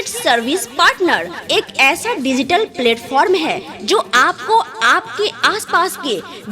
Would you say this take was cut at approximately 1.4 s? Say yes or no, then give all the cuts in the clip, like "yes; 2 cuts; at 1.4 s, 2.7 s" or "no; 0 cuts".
yes; 1 cut; at 1.4 s